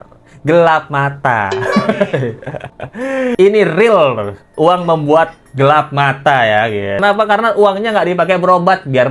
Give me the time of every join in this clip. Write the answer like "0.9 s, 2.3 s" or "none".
3.3 s, 7.0 s